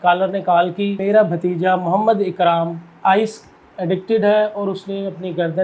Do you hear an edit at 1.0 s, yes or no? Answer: yes